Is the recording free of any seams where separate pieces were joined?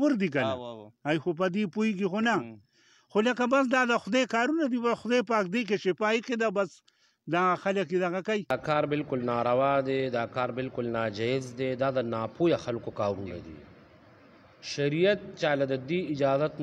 no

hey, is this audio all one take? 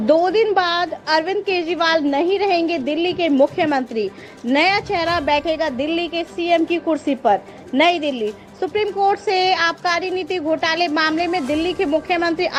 yes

